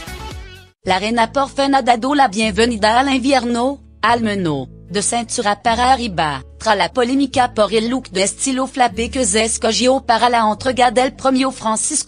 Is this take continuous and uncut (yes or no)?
yes